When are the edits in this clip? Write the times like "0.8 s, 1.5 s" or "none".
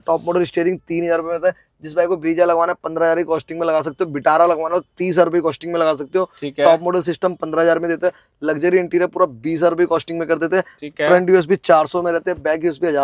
none